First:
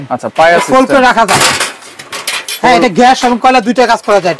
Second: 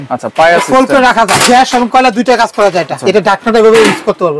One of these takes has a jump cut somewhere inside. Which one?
second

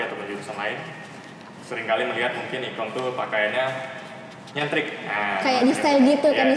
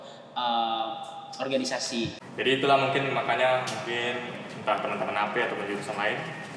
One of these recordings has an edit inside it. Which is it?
second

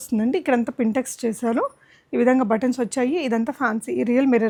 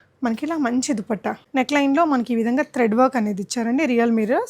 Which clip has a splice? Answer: second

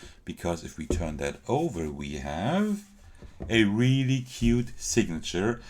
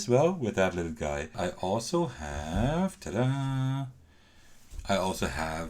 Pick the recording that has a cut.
second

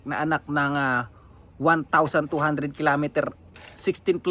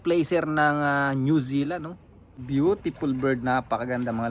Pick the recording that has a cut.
second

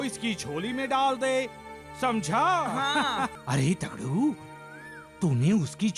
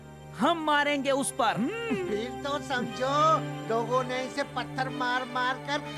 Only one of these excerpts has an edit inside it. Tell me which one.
first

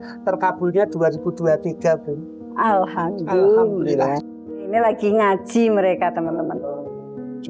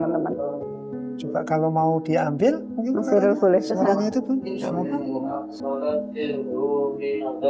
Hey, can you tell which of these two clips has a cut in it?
first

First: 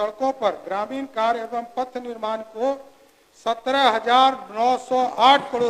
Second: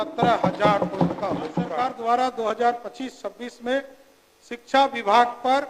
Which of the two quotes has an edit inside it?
second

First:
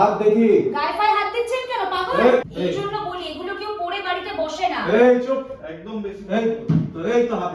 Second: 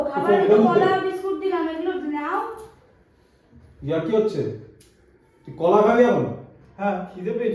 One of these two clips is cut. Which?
first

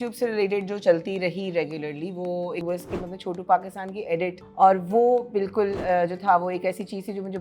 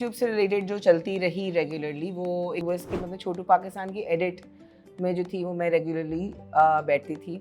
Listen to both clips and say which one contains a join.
first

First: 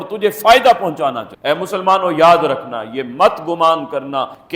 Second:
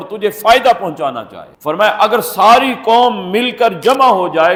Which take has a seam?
first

